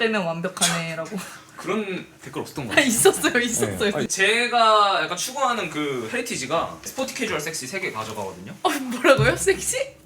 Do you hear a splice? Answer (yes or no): yes